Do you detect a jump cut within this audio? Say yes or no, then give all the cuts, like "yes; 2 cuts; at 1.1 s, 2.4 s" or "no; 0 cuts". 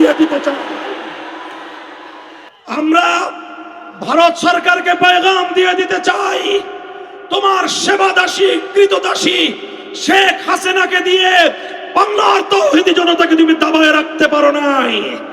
yes; 1 cut; at 2.4 s